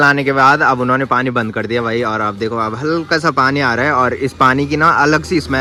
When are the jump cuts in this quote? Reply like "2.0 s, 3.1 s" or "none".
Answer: none